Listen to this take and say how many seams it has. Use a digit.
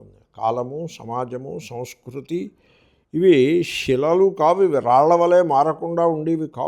0